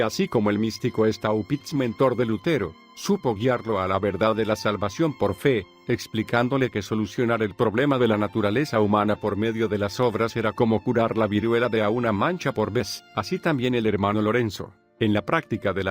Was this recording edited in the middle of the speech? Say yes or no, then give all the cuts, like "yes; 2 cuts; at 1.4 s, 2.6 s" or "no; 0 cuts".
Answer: yes; 1 cut; at 3.0 s